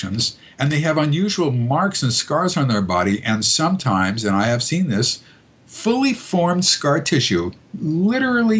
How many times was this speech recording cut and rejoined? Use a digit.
0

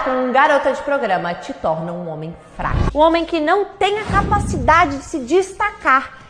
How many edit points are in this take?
1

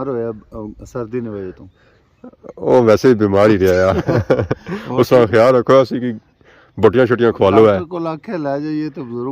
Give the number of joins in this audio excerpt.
0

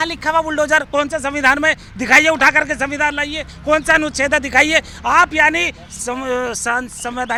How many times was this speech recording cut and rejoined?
0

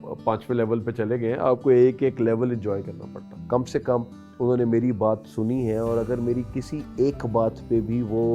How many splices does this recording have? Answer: 1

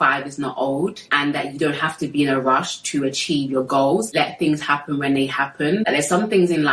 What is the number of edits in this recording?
2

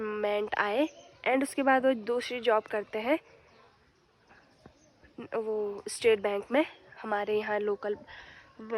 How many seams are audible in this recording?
0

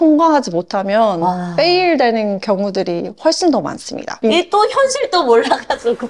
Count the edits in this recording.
1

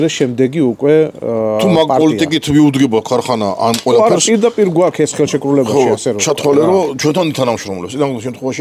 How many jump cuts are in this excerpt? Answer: 0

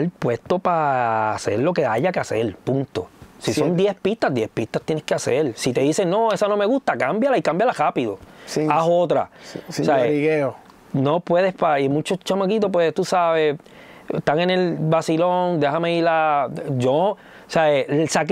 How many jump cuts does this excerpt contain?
0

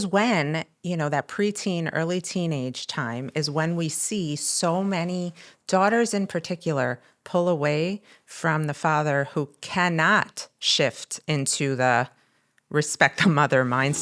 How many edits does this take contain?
0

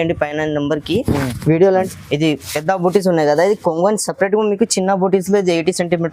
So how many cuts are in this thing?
1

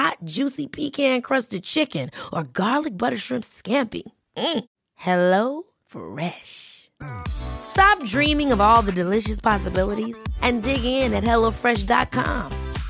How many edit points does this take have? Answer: 0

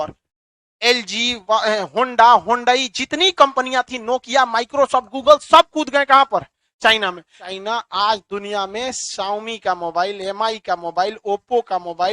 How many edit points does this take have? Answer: 1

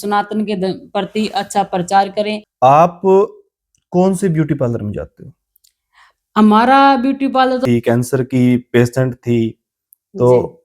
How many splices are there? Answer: 2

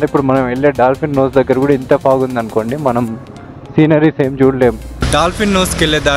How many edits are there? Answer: 1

